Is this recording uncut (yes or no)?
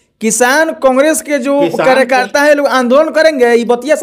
yes